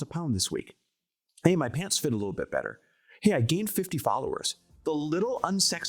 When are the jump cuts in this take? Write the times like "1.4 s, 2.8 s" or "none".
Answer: 4.7 s